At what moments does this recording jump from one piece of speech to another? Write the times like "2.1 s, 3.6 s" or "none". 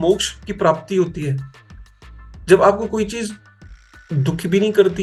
none